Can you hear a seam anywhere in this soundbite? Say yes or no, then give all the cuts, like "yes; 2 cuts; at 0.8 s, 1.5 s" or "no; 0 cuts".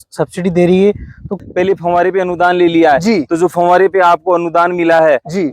yes; 1 cut; at 1.4 s